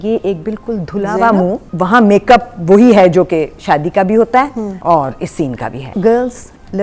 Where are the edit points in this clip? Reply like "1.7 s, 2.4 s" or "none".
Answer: 1.7 s, 4.7 s, 5.9 s